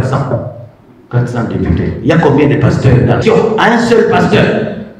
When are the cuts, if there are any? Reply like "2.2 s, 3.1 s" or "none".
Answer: 3.2 s